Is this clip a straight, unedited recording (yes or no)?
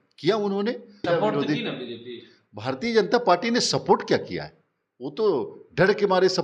no